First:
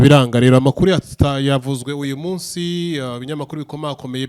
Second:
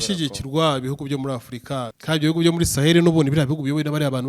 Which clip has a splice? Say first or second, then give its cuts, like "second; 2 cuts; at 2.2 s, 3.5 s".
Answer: second; 1 cut; at 1.9 s